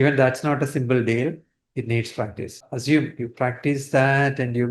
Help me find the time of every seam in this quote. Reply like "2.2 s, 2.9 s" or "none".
2.7 s